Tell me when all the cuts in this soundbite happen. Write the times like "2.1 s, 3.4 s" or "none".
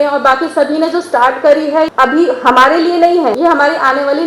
1.9 s, 3.4 s

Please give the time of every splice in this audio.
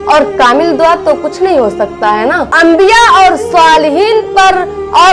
2.5 s

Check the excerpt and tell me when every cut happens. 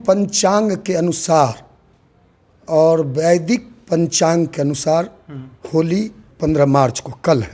6.3 s

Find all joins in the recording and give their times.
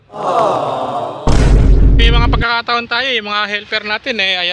none

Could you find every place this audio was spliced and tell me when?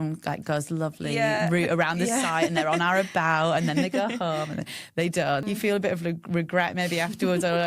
5.4 s

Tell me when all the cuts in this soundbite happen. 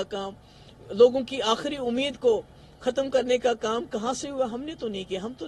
none

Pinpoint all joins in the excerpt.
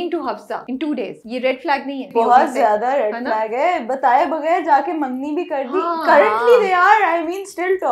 0.9 s, 2.0 s

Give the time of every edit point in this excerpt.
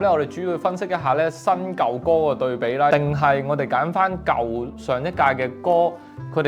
2.9 s

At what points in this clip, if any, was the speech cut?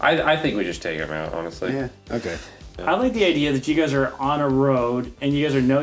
2.8 s

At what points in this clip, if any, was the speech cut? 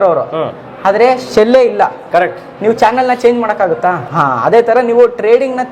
4.0 s

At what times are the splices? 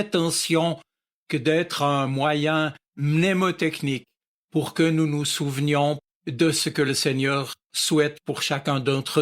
6.0 s

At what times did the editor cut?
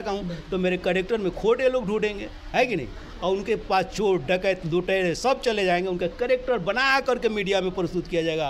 none

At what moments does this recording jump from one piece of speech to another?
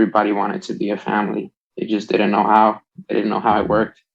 none

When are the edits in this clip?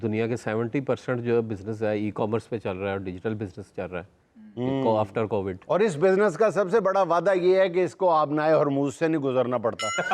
none

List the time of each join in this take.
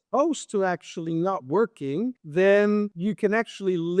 2.2 s, 2.9 s

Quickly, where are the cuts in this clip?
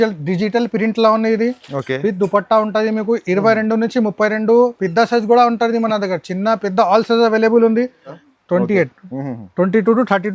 8.3 s

